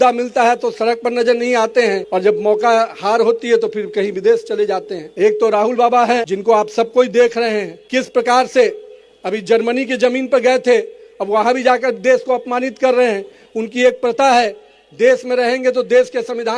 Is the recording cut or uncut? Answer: cut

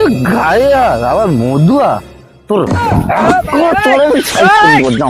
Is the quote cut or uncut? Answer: uncut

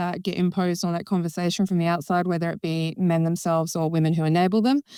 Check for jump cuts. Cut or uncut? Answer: uncut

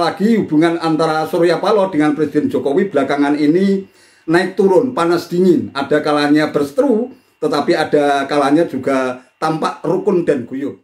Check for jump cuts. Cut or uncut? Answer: uncut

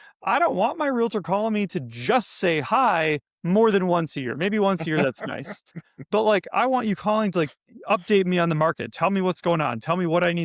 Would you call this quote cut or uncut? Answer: uncut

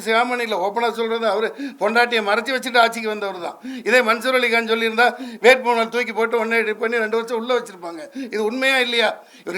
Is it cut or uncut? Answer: uncut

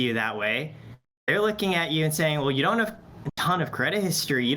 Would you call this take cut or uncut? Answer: uncut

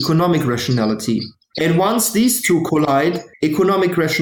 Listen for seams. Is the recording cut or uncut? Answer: cut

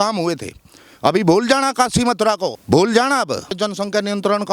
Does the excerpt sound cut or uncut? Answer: cut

